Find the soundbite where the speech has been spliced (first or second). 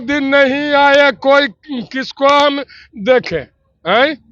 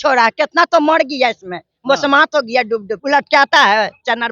second